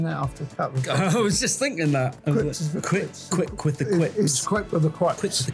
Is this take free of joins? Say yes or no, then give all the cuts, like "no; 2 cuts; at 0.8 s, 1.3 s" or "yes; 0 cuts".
yes; 0 cuts